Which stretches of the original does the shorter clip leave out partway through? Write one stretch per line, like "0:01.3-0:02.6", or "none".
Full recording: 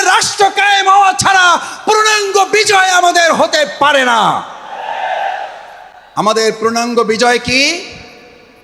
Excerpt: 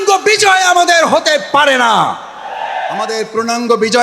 0:05.4-0:06.4